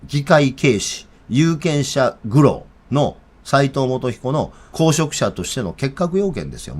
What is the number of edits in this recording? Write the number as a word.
two